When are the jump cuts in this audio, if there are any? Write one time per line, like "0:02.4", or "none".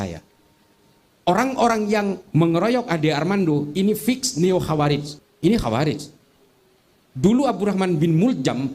0:05.2